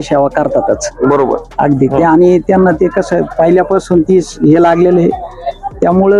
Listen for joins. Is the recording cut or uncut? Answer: uncut